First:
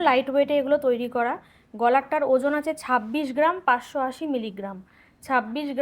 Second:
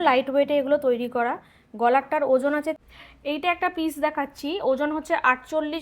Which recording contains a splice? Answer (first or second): second